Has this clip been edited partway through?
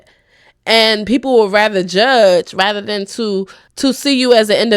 yes; 1 cut; at 3.6 s

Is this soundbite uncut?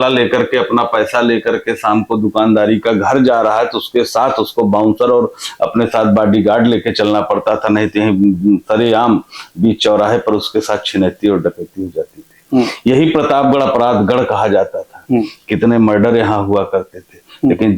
yes; 0 cuts

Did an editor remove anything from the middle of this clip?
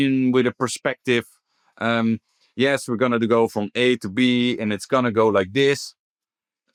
no; 0 cuts

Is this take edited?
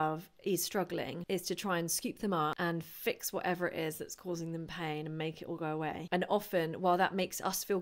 yes; 3 cuts; at 1.2 s, 2.6 s, 6.0 s

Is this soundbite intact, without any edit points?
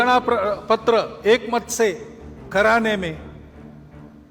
no; 1 cut; at 3.2 s

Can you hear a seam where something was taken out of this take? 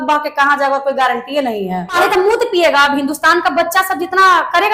yes; 1 cut; at 2.0 s

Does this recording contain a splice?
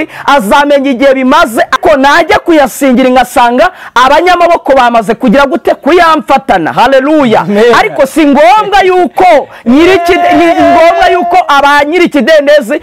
yes; 1 cut; at 1.8 s

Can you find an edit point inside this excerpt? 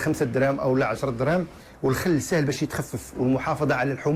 no; 0 cuts

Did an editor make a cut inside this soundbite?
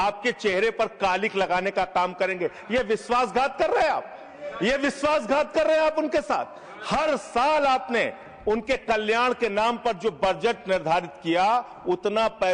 no; 0 cuts

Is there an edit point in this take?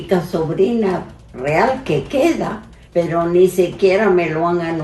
yes; 1 cut; at 2.7 s

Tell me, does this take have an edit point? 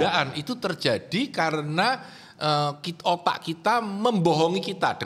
no; 0 cuts

